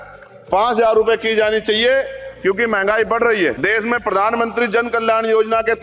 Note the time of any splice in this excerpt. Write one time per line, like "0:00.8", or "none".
0:03.6